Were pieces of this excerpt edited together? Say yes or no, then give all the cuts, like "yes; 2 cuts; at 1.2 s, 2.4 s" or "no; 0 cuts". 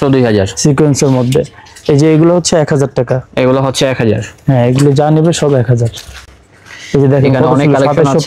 no; 0 cuts